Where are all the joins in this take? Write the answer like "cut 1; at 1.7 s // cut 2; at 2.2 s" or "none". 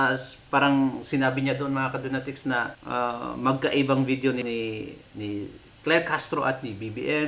cut 1; at 2.8 s // cut 2; at 4.4 s